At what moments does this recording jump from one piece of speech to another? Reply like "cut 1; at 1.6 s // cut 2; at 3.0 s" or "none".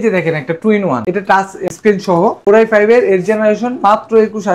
cut 1; at 2.4 s